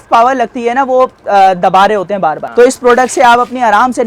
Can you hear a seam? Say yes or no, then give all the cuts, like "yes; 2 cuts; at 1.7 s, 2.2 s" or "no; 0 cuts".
yes; 1 cut; at 2.4 s